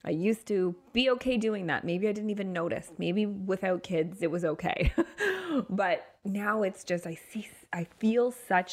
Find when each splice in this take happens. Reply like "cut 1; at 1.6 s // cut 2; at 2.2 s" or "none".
none